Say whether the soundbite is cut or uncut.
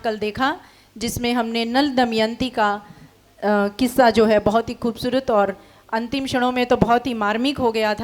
uncut